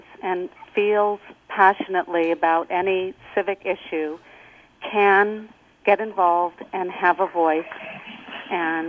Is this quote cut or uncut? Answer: uncut